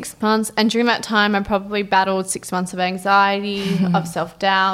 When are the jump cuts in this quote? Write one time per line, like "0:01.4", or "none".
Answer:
none